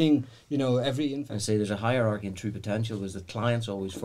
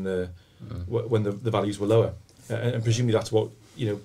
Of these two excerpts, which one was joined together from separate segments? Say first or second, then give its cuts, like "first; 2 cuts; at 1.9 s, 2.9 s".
first; 1 cut; at 1.1 s